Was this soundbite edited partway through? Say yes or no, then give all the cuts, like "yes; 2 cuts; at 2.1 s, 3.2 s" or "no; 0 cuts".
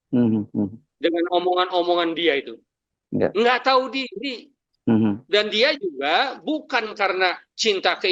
no; 0 cuts